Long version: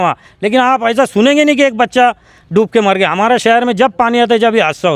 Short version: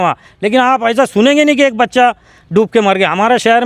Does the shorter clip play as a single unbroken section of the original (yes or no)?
yes